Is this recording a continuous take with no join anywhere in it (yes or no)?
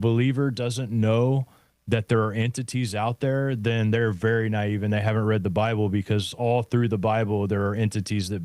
yes